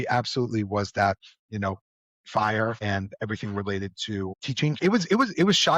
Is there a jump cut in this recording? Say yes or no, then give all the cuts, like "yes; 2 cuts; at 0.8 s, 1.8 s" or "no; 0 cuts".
yes; 1 cut; at 4.8 s